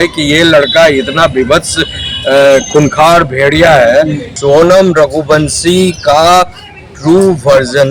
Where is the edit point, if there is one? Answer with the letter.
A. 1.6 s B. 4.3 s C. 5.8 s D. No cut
B